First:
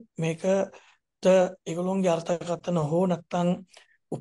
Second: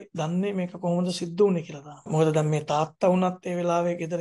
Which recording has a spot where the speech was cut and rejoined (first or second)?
second